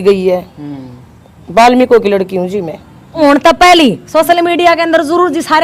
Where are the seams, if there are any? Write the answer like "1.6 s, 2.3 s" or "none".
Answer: 3.1 s